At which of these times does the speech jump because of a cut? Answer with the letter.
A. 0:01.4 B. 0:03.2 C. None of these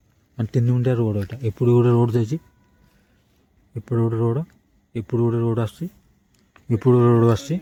C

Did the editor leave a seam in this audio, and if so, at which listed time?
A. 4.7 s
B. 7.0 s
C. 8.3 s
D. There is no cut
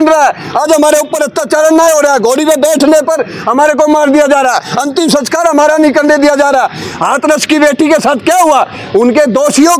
D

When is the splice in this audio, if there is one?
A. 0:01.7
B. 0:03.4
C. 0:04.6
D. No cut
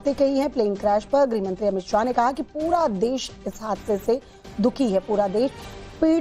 D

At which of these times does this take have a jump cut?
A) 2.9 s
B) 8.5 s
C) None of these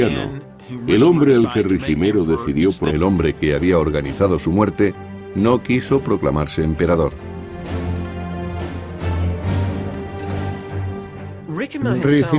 C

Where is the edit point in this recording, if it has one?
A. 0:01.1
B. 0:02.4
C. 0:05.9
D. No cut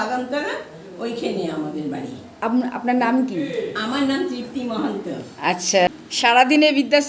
C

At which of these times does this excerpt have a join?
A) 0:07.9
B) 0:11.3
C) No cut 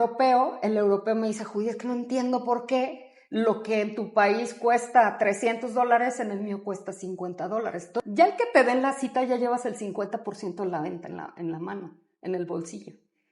A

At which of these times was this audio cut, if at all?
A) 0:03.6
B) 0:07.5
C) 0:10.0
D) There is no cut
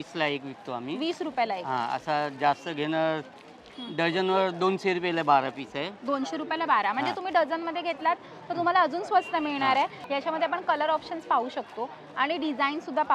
C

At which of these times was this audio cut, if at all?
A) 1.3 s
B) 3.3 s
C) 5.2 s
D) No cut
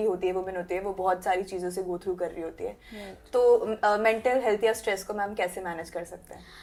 D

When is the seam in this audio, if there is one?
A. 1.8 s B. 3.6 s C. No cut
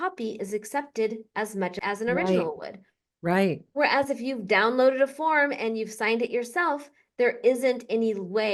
A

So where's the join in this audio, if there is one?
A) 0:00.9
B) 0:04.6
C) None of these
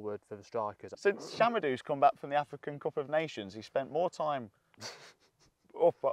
A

